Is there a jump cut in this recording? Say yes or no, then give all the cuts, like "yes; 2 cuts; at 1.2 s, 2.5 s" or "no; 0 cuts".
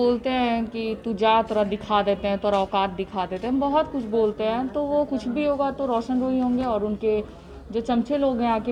no; 0 cuts